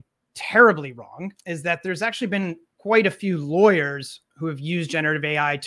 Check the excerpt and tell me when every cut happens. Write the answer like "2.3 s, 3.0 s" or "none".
1.3 s, 2.7 s